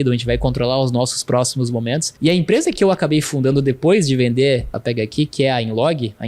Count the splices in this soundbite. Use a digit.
2